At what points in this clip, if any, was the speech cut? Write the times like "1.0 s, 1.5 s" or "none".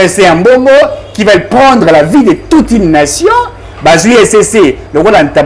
none